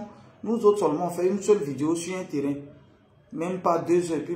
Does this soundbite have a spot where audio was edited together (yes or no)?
no